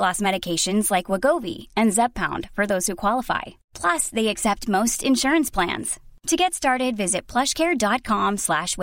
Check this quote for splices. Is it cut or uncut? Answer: uncut